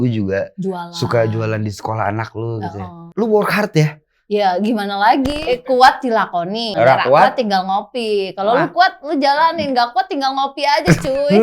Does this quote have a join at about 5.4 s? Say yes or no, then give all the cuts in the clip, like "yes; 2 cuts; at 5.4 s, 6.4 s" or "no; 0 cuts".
yes; 3 cuts; at 3.1 s, 5.4 s, 6.7 s